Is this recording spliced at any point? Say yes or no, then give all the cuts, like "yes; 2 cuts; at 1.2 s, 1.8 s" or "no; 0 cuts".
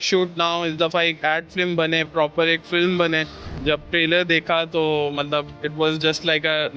yes; 2 cuts; at 3.5 s, 5.6 s